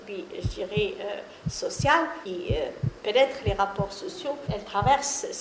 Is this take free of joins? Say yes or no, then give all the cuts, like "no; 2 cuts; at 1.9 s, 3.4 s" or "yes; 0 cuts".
no; 2 cuts; at 2.2 s, 4.5 s